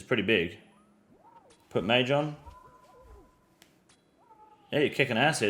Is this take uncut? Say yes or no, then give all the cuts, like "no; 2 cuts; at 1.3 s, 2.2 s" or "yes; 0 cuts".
yes; 0 cuts